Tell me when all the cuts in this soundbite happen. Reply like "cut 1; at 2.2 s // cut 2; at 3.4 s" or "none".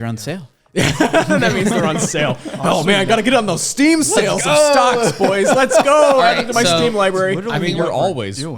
cut 1; at 7.4 s